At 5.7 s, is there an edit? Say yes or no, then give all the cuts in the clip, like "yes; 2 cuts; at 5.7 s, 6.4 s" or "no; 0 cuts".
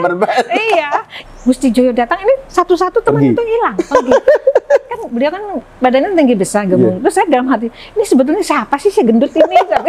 no; 1 cut; at 1.2 s